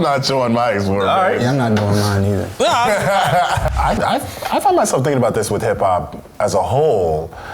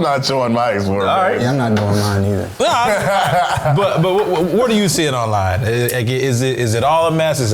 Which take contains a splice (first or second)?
first